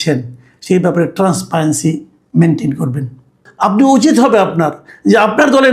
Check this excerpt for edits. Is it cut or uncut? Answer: cut